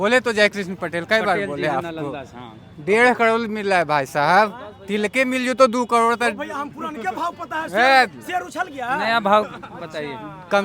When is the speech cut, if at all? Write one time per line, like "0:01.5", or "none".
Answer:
none